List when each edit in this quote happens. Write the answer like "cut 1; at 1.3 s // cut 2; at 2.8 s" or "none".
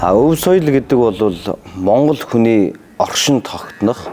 none